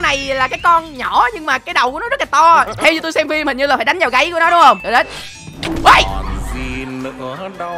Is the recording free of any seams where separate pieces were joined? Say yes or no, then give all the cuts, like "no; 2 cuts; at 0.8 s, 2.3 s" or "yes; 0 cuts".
no; 2 cuts; at 2.7 s, 4.8 s